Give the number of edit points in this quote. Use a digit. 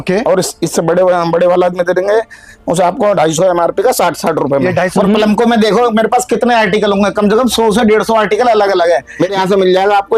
2